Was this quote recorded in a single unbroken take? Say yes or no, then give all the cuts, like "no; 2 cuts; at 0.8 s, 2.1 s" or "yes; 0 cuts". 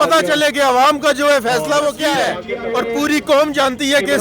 no; 1 cut; at 2.4 s